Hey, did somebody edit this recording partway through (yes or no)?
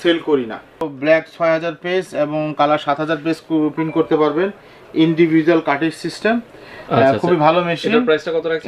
yes